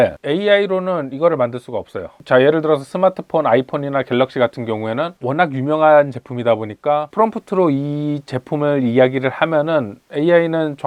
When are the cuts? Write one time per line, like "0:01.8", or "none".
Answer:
none